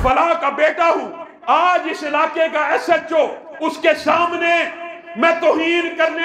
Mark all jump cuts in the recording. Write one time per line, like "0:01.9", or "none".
none